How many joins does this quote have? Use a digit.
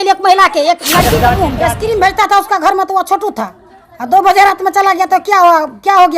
1